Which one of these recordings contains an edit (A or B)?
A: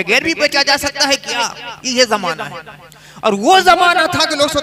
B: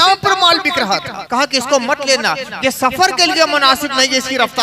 B